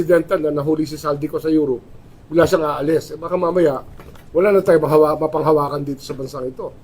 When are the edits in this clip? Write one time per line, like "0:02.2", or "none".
0:03.4